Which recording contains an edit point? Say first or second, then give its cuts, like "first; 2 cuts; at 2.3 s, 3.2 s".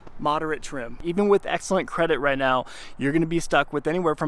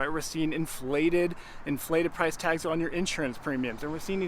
first; 1 cut; at 1.0 s